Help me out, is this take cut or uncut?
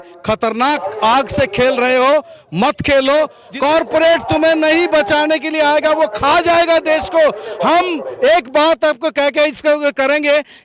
cut